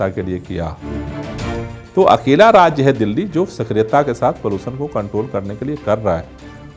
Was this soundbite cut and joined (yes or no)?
yes